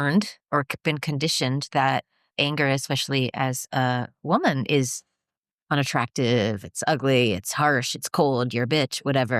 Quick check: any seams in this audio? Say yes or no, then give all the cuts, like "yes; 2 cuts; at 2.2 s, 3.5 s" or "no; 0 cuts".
no; 0 cuts